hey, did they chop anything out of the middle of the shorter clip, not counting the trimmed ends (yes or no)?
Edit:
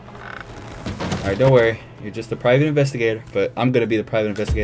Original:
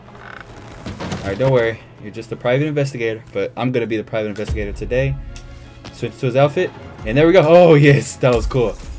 no